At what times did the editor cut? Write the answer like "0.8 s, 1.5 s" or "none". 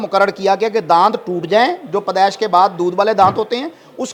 none